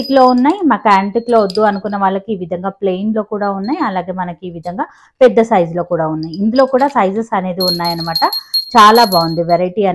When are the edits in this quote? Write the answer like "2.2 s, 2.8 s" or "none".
none